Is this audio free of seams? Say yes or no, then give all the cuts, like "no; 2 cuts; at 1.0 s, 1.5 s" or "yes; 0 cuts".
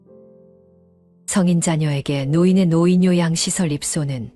no; 1 cut; at 1.3 s